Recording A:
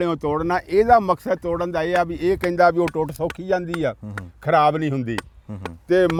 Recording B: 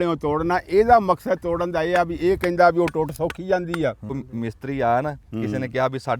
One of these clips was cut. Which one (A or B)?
B